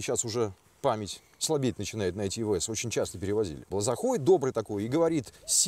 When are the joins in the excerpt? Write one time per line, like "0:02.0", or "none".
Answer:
0:03.6